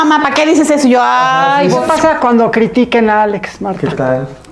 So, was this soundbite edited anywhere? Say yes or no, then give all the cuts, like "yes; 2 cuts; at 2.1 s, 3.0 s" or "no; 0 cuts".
yes; 1 cut; at 1.8 s